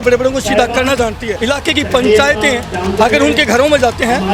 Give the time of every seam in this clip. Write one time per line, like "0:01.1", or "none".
0:01.3